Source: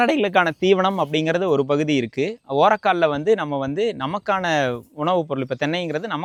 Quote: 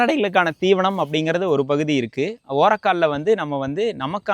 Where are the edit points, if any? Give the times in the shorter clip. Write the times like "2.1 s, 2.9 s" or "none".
none